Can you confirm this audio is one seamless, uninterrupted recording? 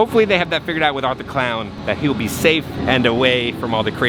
yes; 0 cuts

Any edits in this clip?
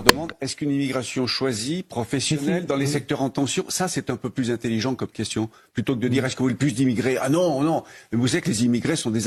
no; 0 cuts

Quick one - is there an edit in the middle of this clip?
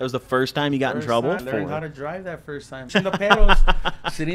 yes; 2 cuts; at 1.4 s, 2.9 s

